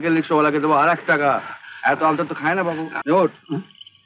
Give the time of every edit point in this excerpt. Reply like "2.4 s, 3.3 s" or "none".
2.9 s